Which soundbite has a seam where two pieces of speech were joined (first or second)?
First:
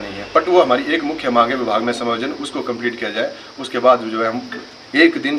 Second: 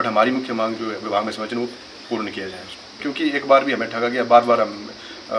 second